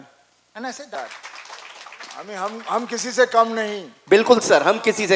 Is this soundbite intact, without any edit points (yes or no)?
no